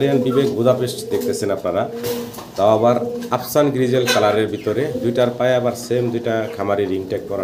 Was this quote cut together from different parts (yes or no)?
no